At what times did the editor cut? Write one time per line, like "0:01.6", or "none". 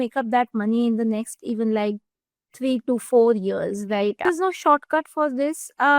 0:04.2